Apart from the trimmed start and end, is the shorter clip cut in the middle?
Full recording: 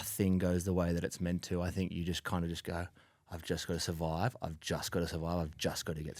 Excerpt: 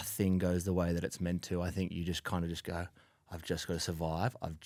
no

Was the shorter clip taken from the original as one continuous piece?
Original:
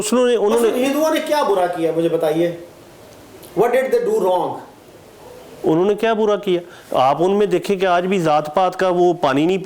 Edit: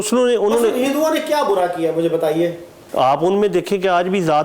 no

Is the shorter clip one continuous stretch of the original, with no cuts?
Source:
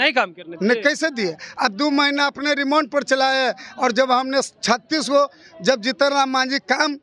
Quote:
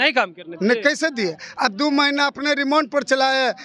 yes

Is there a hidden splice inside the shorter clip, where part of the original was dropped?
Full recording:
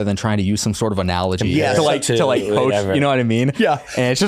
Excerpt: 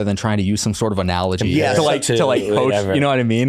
no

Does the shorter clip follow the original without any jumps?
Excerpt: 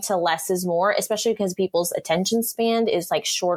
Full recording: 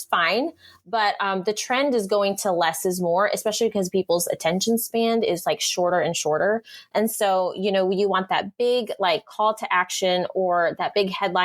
yes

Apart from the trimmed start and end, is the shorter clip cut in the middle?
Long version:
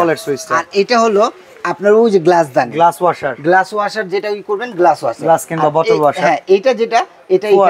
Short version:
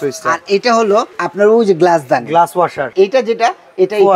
yes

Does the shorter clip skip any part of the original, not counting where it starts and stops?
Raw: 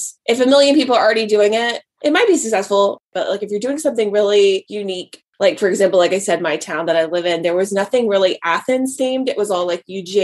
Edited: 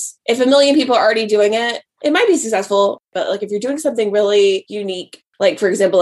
no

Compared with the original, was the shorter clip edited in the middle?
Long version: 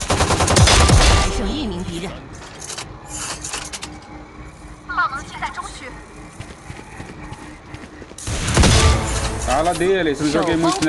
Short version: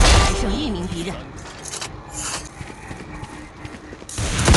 yes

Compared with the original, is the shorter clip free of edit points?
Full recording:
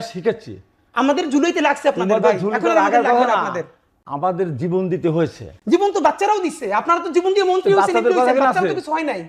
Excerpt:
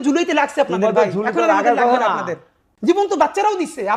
no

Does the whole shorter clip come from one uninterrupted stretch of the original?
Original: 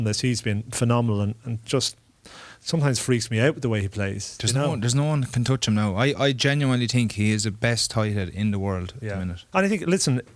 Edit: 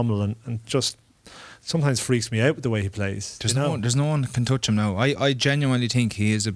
yes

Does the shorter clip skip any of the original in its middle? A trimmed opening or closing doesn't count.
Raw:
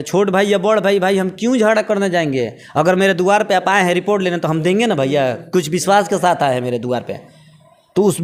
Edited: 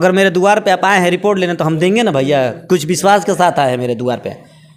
no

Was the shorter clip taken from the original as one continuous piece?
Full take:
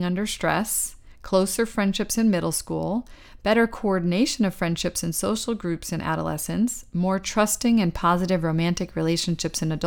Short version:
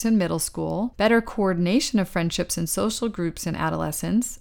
no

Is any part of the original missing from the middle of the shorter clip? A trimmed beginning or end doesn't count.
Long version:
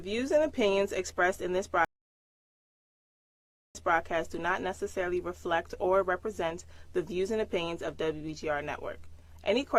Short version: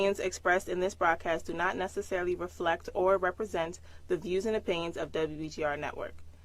yes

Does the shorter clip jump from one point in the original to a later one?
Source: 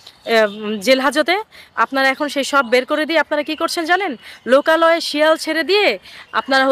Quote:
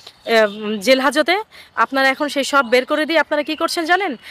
no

